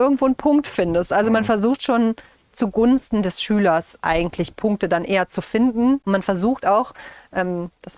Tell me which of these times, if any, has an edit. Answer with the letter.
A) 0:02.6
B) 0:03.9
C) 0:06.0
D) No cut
C